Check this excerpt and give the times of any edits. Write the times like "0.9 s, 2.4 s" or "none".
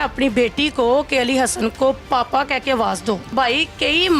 3.2 s